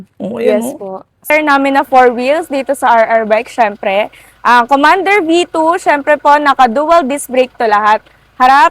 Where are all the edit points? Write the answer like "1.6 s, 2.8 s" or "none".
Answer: 1.3 s